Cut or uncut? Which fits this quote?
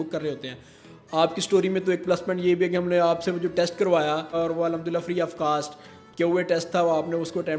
cut